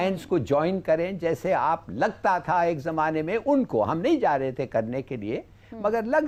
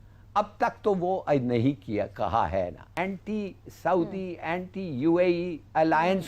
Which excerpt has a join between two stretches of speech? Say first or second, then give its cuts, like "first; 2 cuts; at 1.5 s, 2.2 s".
second; 1 cut; at 2.9 s